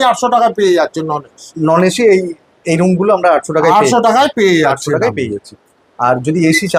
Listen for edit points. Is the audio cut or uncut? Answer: uncut